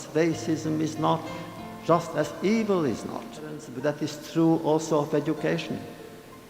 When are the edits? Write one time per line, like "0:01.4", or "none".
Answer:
0:03.7